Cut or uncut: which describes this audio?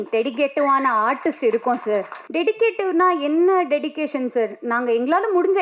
cut